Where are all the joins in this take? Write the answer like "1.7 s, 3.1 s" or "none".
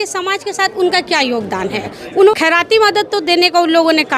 2.3 s